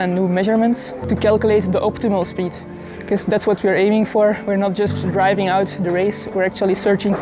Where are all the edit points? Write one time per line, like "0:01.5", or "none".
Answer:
0:01.1

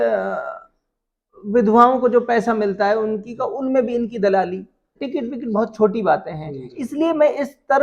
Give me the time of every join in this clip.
0:05.0

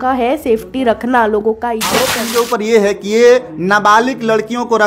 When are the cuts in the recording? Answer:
0:02.2

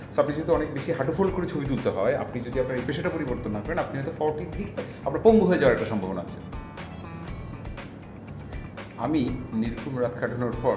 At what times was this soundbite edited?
none

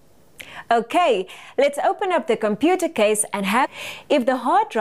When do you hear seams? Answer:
none

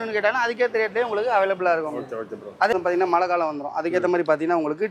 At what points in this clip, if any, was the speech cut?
0:02.7

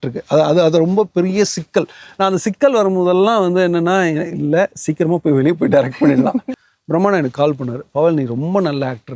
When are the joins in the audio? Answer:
0:06.6

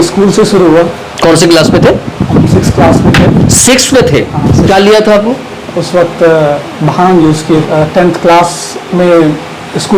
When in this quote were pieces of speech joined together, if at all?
0:07.6

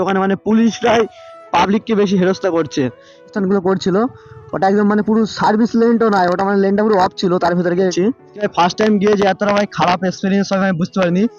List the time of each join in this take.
0:03.4
0:07.9

